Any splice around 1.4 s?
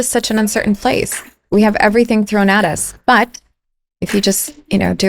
yes; 1 cut; at 1.4 s

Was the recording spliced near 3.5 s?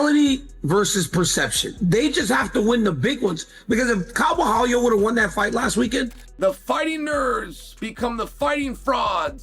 no; 1 cut; at 6.2 s

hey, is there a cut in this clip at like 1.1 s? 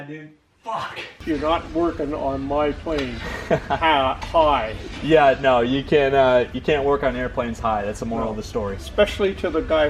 yes; 1 cut; at 1.1 s

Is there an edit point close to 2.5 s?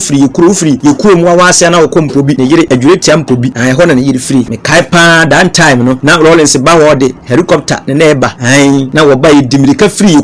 yes; 6 cuts; at 0.8 s, 2.5 s, 3.5 s, 4.6 s, 6.0 s, 8.7 s

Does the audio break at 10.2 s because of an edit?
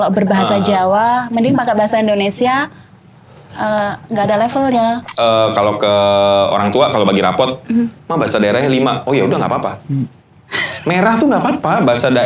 no; 1 cut; at 5.1 s

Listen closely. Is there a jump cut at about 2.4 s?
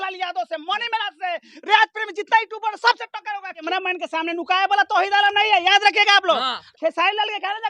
no; 2 cuts; at 3.7 s, 6.6 s

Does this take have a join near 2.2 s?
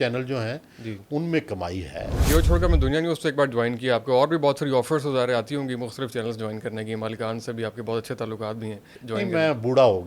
yes; 2 cuts; at 2.2 s, 8.9 s

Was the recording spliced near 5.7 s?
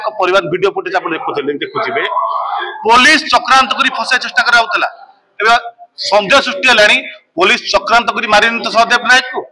no; 0 cuts

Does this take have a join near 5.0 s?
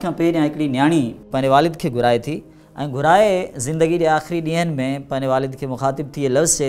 no; 1 cut; at 1.2 s

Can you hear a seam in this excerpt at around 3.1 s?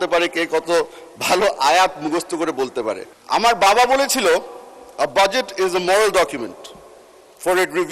yes; 1 cut; at 3.1 s

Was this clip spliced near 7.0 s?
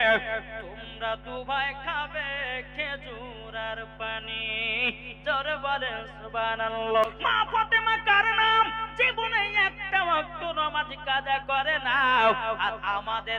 yes; 1 cut; at 7.0 s

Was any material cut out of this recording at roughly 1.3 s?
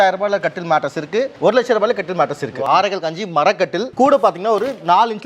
yes; 2 cuts; at 1.3 s, 2.6 s

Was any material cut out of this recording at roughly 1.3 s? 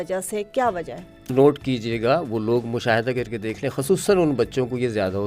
yes; 1 cut; at 1.3 s

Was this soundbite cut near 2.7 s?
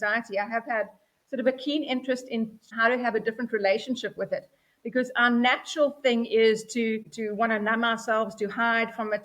yes; 2 cuts; at 2.7 s, 7.1 s

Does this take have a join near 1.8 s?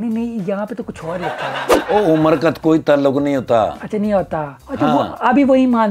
yes; 1 cut; at 1.8 s

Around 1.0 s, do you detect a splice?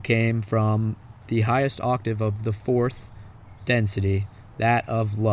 no; 0 cuts

